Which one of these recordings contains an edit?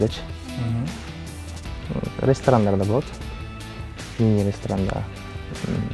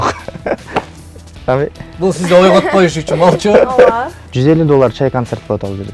second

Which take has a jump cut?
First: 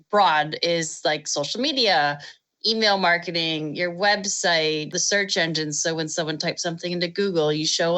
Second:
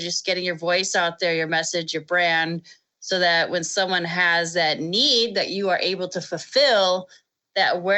first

